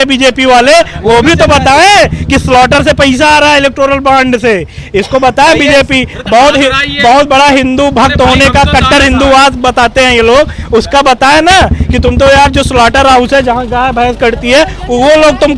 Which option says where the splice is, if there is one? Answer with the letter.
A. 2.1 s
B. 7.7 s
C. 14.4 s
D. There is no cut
D